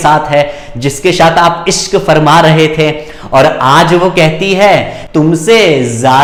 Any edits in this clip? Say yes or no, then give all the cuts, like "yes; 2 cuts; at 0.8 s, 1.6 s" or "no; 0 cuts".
no; 0 cuts